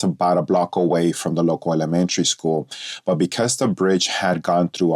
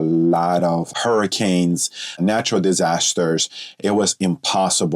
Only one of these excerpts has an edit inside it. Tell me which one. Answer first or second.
second